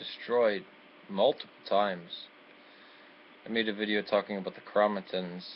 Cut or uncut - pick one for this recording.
uncut